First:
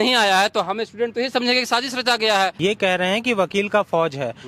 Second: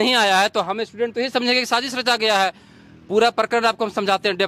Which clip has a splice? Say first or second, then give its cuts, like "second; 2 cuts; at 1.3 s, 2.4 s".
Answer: first; 1 cut; at 2.5 s